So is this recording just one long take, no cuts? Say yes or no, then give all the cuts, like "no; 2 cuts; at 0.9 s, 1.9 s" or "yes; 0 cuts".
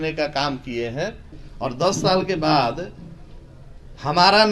no; 1 cut; at 1.4 s